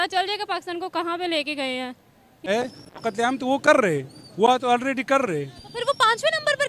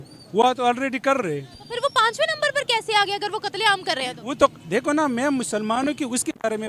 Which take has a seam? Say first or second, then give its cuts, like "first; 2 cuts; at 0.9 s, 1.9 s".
first; 1 cut; at 2.5 s